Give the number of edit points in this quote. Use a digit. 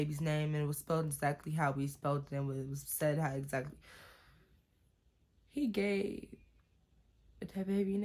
0